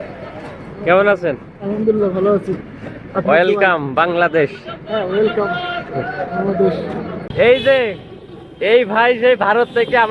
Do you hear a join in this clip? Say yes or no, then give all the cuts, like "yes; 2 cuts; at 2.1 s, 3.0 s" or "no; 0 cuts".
no; 0 cuts